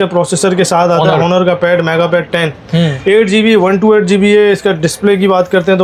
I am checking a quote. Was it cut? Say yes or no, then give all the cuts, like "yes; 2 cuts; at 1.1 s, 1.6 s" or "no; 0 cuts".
no; 0 cuts